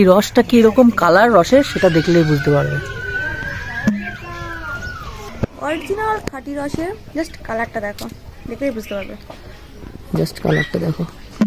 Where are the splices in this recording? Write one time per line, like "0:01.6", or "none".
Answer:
none